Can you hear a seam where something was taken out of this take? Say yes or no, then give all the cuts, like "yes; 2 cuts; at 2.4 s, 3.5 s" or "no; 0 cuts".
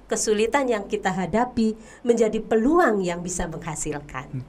no; 0 cuts